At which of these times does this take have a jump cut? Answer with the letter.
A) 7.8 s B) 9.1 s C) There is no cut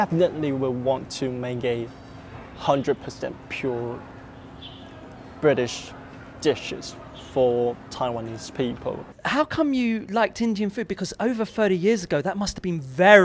B